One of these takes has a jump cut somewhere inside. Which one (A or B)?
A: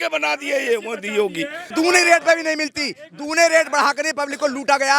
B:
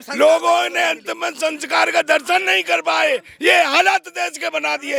A